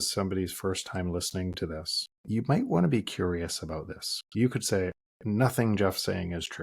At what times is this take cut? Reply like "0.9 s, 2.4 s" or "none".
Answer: 2.1 s